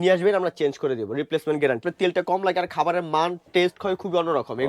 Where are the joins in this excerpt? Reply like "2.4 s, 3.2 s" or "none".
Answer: 1.8 s